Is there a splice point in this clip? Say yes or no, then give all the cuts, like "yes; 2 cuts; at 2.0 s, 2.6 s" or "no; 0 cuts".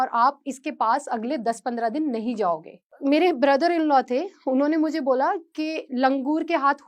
yes; 1 cut; at 2.9 s